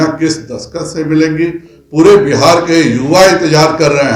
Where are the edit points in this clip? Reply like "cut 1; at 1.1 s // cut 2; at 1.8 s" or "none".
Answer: none